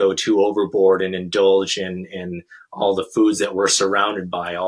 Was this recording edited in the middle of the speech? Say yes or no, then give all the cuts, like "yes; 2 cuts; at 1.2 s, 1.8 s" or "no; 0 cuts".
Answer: no; 0 cuts